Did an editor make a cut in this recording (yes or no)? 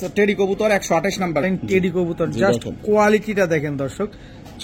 yes